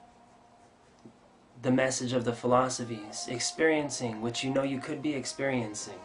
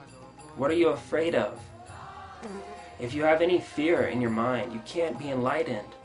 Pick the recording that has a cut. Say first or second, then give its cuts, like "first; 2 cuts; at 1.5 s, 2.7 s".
first; 1 cut; at 3.9 s